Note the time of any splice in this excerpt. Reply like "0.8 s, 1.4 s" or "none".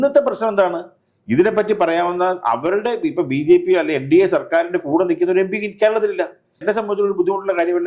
6.6 s